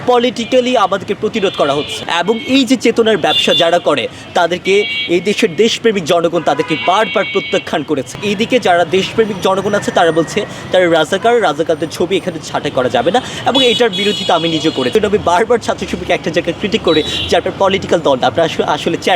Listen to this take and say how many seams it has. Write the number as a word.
three